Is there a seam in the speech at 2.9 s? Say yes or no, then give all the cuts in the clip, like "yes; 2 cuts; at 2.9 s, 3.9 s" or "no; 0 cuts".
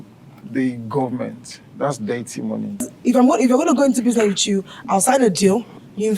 yes; 1 cut; at 2.9 s